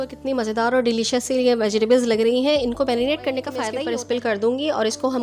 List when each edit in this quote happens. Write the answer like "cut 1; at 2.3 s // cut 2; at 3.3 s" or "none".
cut 1; at 3.7 s